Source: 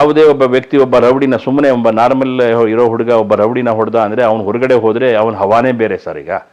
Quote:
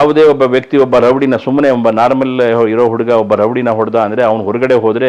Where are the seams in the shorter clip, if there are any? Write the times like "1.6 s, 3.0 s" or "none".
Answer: none